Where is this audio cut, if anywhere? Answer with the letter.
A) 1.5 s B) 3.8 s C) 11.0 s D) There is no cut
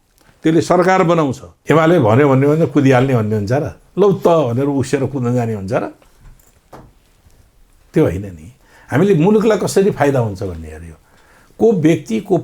A